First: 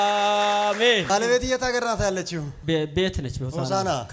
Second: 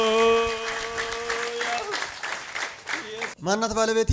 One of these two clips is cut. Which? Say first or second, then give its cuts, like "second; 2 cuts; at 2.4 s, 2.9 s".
first; 1 cut; at 1.1 s